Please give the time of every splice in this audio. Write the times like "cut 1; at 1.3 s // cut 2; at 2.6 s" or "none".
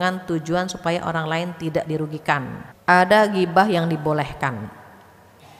cut 1; at 2.6 s

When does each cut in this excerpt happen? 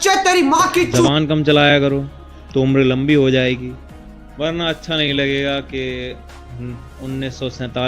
cut 1; at 1.1 s

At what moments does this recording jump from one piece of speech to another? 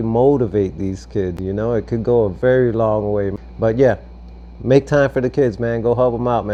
none

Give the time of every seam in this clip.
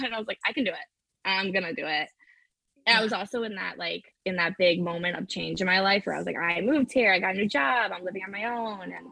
none

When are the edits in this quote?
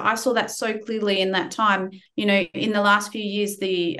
cut 1; at 2.0 s

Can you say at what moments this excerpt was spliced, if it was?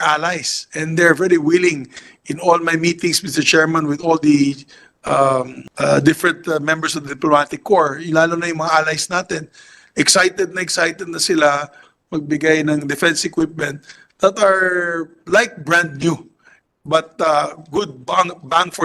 cut 1; at 5.6 s

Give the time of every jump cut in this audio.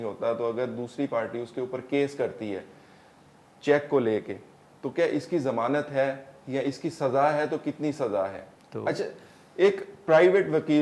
cut 1; at 8.5 s

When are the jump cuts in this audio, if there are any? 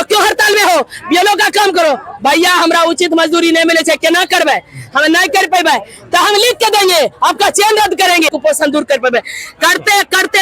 cut 1; at 8.3 s

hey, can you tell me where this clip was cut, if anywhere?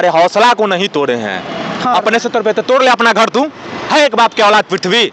cut 1; at 1.9 s

